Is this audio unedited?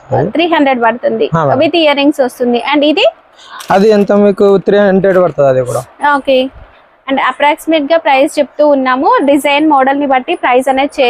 yes; 0 cuts

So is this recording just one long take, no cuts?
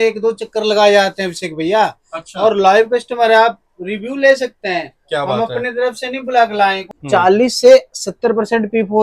no; 1 cut; at 6.9 s

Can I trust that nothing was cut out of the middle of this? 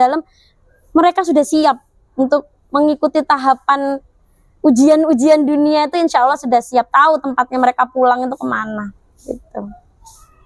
yes; 0 cuts

